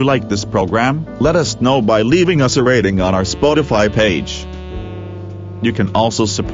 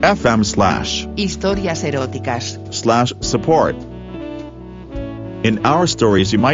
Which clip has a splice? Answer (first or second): second